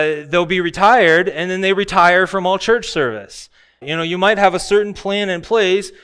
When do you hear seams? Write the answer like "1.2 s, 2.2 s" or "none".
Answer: 3.9 s

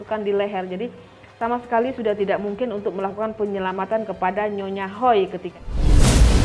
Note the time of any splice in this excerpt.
5.4 s

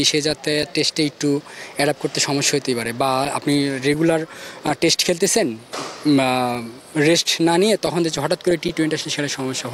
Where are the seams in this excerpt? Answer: none

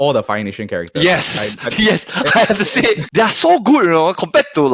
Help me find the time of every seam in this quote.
3.0 s

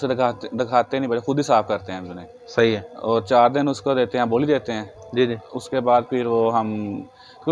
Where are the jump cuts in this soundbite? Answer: none

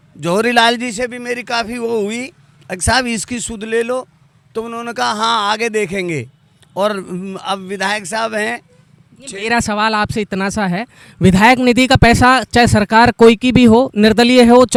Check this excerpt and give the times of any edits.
none

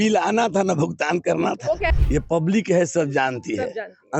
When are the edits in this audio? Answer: 1.9 s

